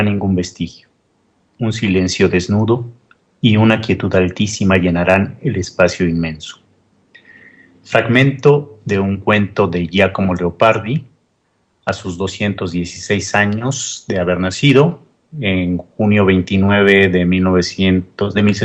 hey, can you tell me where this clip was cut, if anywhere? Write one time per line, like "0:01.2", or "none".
0:13.1